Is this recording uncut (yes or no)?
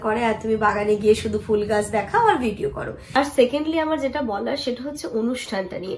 no